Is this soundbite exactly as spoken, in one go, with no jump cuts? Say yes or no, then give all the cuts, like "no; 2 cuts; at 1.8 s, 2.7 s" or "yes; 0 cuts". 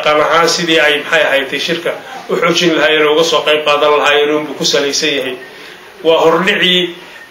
yes; 0 cuts